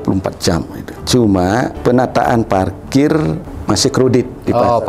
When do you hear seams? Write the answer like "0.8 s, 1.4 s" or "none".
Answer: 1.0 s, 1.8 s, 3.5 s